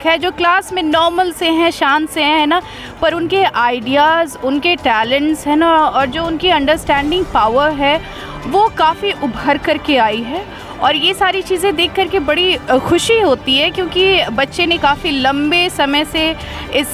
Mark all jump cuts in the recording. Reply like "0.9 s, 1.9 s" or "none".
none